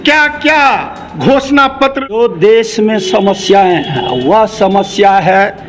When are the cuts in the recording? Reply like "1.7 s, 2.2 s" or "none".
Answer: 2.1 s

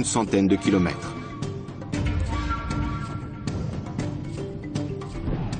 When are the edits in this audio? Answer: 2.3 s

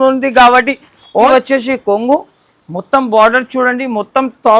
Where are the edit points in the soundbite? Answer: 1.3 s

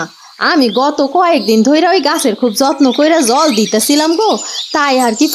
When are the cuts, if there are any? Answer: none

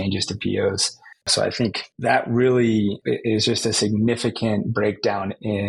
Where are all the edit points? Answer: none

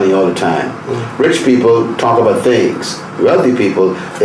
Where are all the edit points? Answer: none

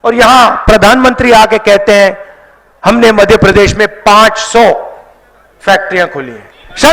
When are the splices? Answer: none

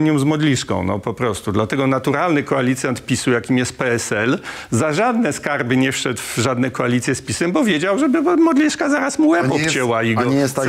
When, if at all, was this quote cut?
none

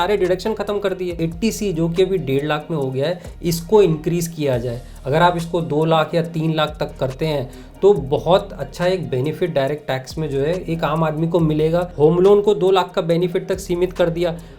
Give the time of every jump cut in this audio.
1.2 s, 11.9 s

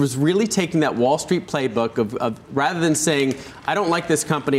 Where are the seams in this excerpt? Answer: none

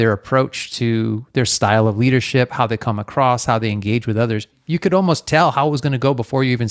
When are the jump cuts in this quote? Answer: none

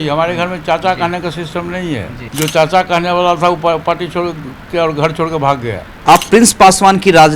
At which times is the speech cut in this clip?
2.2 s, 5.9 s

